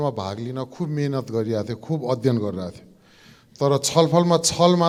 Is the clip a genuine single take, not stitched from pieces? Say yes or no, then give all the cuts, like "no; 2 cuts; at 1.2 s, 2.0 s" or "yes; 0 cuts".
yes; 0 cuts